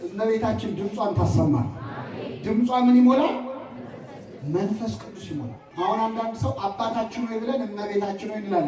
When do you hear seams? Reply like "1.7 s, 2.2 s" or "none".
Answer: 5.7 s

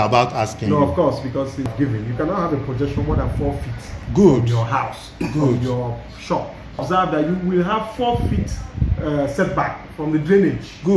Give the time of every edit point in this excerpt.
1.7 s, 6.8 s

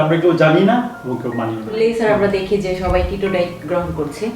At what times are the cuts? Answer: 1.7 s

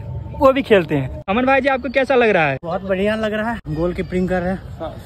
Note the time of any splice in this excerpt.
1.2 s, 2.6 s, 3.6 s

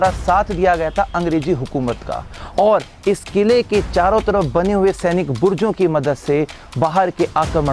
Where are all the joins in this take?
2.4 s

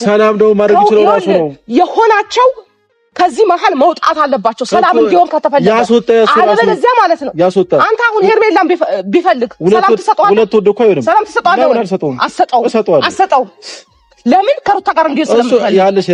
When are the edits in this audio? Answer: none

